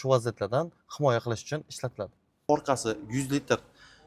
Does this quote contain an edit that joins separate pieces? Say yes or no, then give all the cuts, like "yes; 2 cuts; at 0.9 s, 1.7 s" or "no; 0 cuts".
yes; 1 cut; at 2.5 s